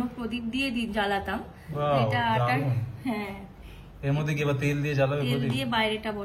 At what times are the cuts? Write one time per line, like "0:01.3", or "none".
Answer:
none